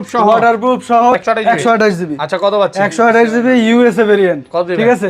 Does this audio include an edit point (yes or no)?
yes